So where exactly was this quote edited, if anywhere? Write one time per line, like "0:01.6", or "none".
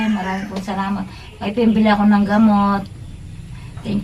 none